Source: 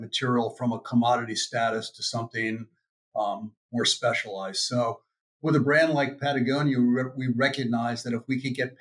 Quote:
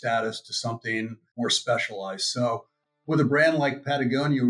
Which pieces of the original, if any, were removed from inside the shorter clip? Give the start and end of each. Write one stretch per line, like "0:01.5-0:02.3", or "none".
0:02.7-0:03.6

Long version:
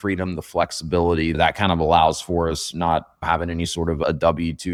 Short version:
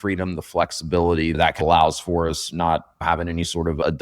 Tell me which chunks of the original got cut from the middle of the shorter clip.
0:01.6-0:01.8

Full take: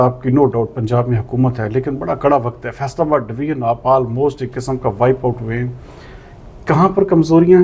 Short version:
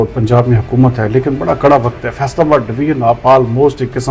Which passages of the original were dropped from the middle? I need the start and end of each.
none

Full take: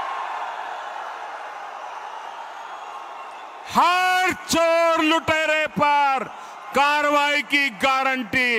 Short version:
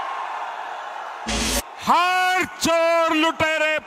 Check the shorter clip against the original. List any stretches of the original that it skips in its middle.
0:01.4-0:03.3

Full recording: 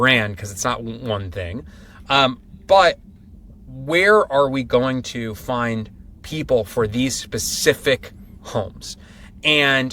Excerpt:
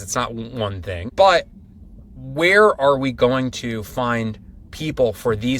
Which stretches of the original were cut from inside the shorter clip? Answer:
0:01.5-0:02.6

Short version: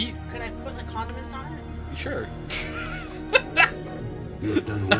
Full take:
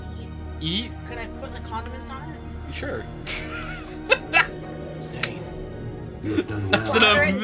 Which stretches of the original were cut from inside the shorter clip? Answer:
0:04.8-0:05.8

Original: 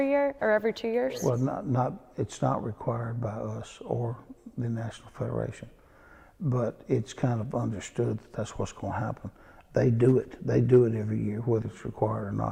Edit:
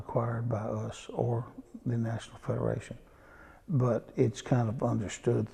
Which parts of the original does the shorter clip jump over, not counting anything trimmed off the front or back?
none

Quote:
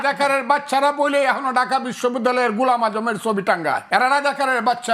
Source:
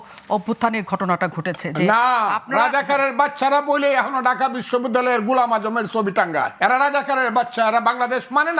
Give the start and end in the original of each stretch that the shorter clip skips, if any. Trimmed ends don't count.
none

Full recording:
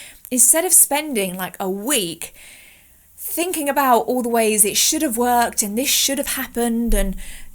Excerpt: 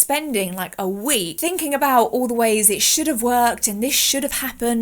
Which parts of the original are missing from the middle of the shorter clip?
0:02.1-0:03.3

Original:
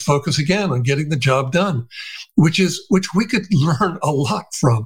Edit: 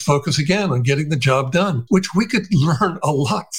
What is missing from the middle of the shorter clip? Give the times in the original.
0:01.8-0:02.8

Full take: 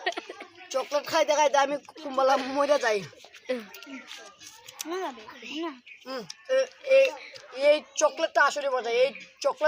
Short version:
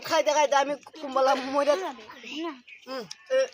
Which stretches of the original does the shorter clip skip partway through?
0:02.8-0:05.0

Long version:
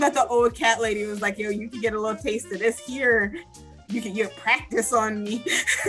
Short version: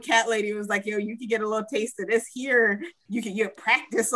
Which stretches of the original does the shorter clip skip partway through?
0:03.5-0:03.7

